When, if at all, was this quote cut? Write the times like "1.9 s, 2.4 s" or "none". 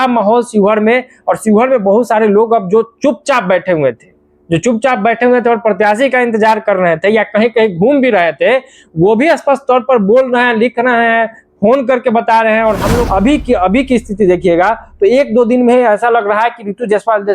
13.0 s